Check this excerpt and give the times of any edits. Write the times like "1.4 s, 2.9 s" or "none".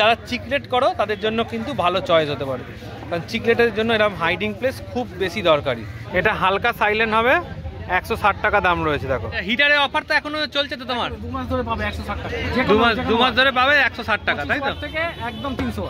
6.0 s, 9.4 s